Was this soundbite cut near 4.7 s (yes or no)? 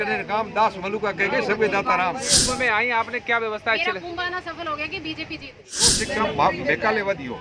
no